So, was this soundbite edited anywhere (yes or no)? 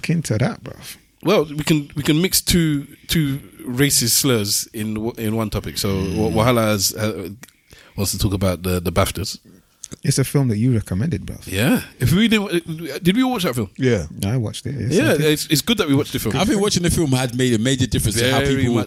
no